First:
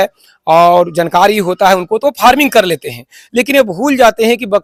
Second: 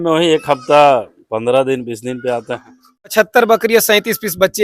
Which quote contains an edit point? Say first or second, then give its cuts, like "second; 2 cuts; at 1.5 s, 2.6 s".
second; 1 cut; at 3.1 s